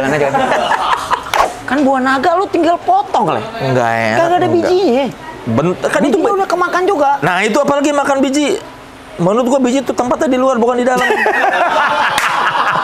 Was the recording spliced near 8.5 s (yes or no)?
no